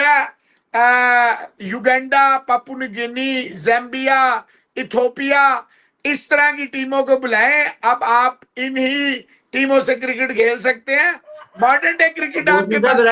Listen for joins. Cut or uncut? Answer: uncut